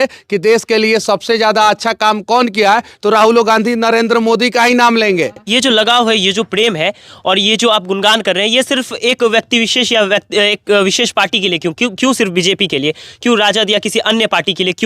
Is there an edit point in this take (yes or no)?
yes